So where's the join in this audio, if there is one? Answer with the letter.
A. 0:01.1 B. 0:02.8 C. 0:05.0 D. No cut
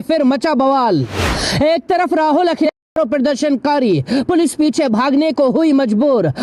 B